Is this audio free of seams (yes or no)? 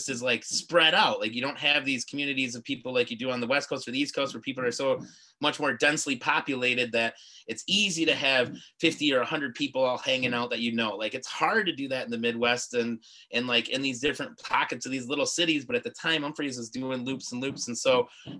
yes